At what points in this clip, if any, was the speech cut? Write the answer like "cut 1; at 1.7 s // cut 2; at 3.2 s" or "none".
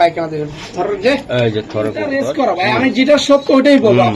cut 1; at 2.2 s